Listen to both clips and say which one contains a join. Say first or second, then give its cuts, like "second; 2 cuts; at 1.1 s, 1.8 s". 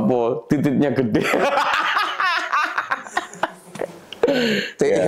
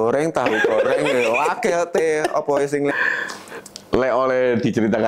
second; 1 cut; at 2.9 s